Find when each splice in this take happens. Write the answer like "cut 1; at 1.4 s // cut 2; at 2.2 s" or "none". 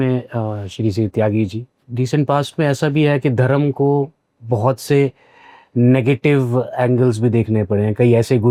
none